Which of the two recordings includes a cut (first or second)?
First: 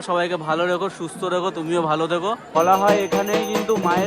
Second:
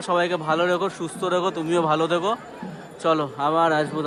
first